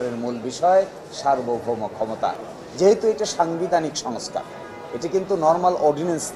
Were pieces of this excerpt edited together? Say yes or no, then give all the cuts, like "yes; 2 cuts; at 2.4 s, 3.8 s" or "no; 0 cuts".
yes; 1 cut; at 2.5 s